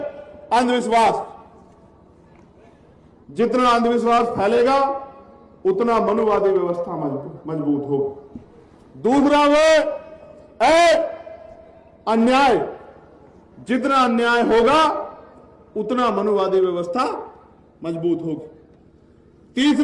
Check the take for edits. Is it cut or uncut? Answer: uncut